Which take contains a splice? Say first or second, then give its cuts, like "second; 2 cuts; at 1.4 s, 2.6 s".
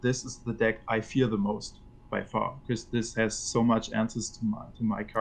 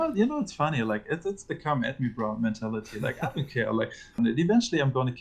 second; 1 cut; at 4.0 s